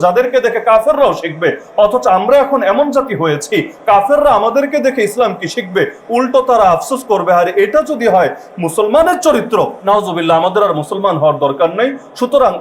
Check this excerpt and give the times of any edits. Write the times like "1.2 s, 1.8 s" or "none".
9.8 s